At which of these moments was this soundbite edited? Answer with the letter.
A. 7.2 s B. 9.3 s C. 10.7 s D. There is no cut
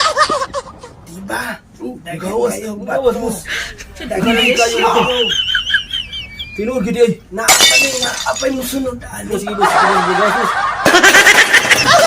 B